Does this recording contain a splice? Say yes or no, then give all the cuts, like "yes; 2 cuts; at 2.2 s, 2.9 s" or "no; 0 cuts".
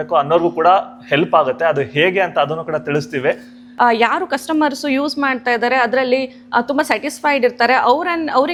no; 0 cuts